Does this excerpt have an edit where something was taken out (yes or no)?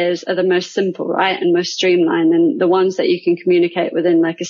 no